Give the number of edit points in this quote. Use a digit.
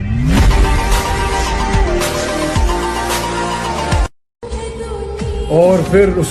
1